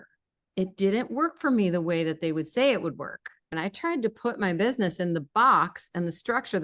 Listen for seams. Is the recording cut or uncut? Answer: cut